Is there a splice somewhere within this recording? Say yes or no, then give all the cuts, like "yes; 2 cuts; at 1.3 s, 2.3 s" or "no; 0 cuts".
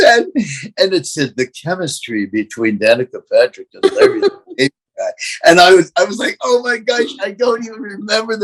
no; 0 cuts